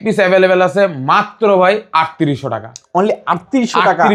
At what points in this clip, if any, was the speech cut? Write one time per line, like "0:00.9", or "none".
none